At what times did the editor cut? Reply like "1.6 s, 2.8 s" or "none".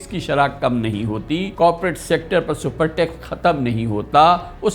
1.5 s